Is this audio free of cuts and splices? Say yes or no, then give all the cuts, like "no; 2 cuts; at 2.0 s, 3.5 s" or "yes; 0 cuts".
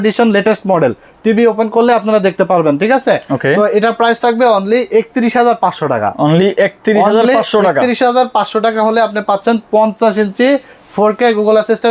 yes; 0 cuts